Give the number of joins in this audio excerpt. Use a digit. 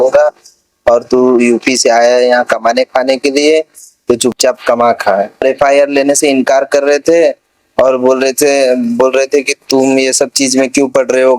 1